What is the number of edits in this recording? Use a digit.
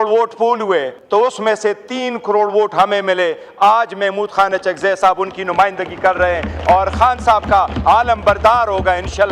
1